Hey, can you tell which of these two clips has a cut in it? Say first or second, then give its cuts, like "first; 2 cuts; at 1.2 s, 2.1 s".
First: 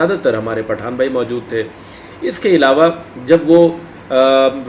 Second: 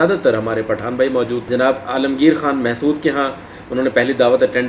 second; 1 cut; at 1.5 s